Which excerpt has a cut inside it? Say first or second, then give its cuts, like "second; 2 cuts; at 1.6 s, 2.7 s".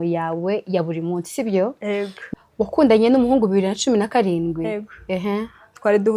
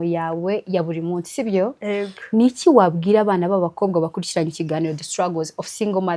first; 1 cut; at 2.2 s